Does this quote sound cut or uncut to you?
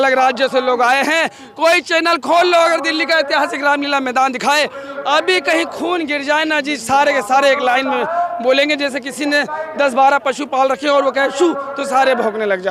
uncut